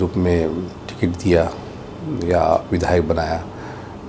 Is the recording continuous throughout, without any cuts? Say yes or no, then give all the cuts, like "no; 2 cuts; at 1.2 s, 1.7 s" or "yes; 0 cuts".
yes; 0 cuts